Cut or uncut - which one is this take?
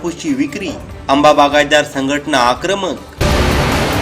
uncut